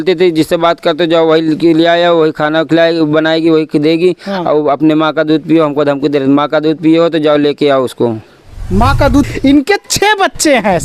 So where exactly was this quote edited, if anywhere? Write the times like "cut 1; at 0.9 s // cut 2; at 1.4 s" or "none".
cut 1; at 9.3 s